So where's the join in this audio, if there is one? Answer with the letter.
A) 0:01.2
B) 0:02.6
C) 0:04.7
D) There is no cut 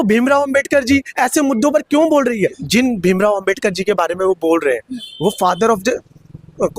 B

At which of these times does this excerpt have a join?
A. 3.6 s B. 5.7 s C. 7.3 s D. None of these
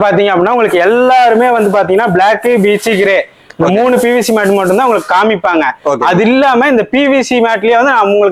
D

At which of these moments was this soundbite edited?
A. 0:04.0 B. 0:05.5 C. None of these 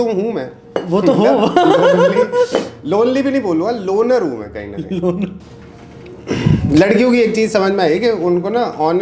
B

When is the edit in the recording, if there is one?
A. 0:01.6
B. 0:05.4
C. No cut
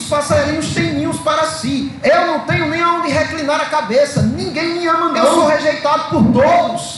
B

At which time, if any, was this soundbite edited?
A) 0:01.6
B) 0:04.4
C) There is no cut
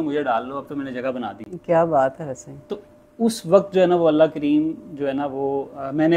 C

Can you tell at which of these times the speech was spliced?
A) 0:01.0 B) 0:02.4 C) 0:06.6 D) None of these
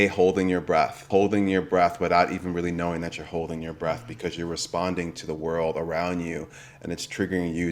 A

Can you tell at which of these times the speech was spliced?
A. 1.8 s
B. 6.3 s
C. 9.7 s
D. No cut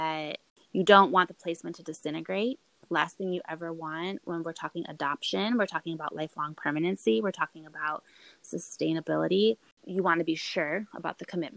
C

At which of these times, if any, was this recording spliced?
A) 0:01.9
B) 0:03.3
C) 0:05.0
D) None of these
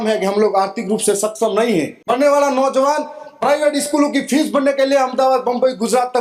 A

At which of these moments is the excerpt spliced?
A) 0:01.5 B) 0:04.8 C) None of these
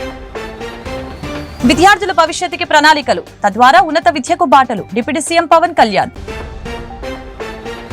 A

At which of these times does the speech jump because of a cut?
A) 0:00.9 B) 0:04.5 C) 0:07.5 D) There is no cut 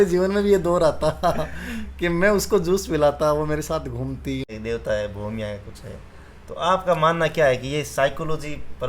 B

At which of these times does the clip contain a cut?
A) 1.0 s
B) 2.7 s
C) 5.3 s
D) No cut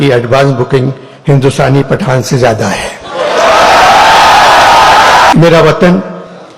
C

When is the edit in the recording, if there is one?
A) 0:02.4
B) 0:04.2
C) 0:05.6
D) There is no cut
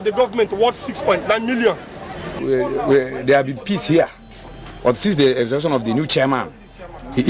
A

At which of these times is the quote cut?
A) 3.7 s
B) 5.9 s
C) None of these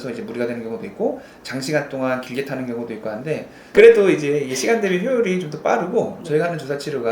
A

